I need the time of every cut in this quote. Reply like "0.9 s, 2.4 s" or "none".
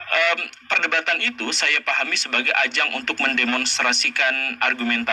none